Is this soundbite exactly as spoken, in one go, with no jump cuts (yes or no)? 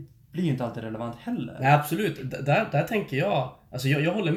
yes